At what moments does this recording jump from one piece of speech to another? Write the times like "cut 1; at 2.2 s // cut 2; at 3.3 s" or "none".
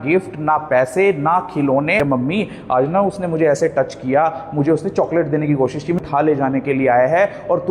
cut 1; at 2.0 s // cut 2; at 6.0 s